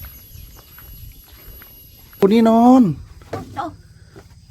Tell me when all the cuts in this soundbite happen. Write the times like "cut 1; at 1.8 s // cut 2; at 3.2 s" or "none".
cut 1; at 2.2 s